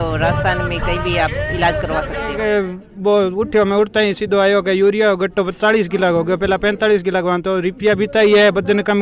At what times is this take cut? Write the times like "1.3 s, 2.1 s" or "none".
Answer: 2.4 s